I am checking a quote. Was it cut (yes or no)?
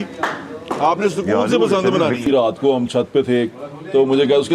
yes